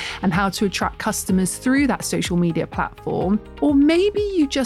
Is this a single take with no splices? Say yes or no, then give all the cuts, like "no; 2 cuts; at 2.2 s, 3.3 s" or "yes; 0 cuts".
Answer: no; 1 cut; at 3.5 s